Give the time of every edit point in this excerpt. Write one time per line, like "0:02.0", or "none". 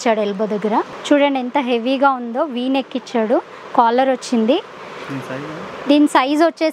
0:00.9